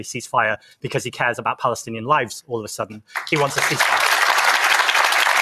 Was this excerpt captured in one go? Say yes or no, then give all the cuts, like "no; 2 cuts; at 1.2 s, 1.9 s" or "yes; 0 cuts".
yes; 0 cuts